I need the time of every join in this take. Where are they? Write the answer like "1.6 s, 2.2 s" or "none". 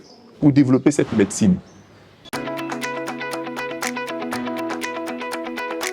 2.2 s